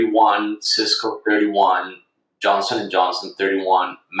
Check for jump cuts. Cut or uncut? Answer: uncut